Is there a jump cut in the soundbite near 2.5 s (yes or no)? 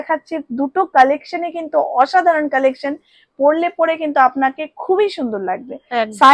no